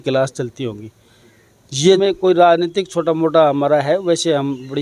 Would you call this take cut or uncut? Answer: cut